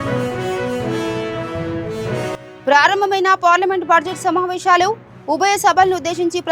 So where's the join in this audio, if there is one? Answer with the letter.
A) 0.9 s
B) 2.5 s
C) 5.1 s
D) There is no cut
B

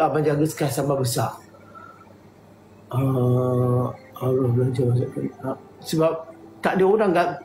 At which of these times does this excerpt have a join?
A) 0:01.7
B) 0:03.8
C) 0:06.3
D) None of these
D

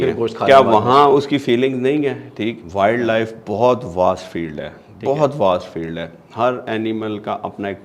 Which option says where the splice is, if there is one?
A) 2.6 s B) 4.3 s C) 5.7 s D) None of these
A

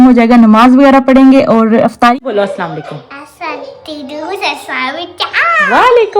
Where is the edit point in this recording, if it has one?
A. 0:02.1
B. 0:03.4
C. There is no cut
A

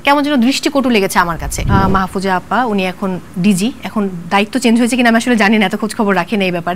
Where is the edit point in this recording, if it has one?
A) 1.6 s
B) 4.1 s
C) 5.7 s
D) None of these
A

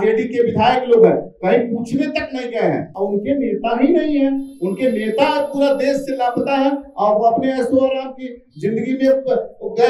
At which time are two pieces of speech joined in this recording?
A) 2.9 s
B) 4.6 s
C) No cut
A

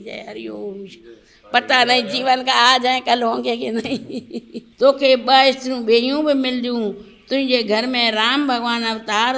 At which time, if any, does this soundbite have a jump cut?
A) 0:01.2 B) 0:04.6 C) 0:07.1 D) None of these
B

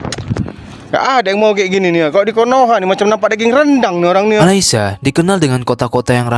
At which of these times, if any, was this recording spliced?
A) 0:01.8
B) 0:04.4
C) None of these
B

